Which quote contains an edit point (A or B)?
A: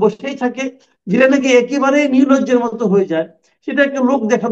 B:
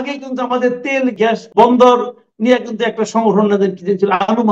B